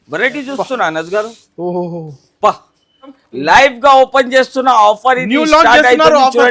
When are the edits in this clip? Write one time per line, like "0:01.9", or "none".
0:03.2

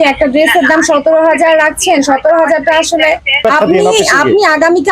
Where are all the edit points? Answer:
0:03.4

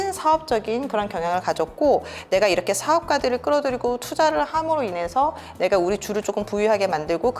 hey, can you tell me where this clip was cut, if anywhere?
none

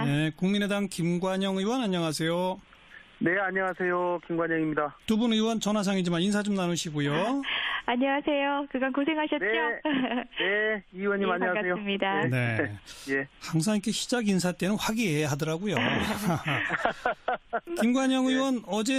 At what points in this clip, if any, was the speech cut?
none

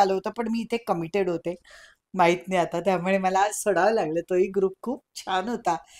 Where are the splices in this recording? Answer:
none

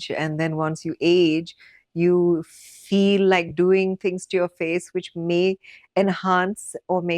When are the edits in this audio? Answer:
none

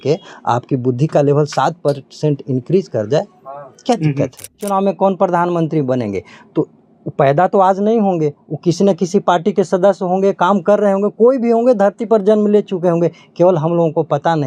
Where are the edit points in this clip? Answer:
0:04.6

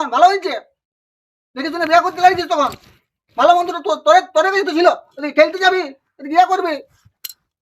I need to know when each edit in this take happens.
none

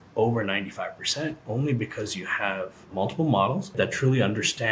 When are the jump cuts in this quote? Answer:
0:02.9
0:03.7

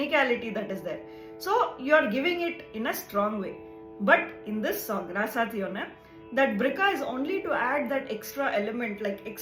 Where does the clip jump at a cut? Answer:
none

